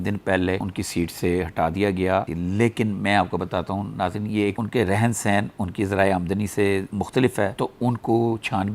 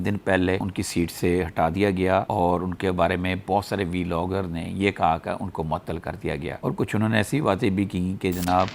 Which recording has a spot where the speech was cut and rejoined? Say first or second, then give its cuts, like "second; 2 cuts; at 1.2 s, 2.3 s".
first; 2 cuts; at 2.3 s, 4.6 s